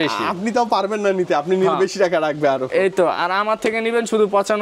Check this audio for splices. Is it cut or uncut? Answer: uncut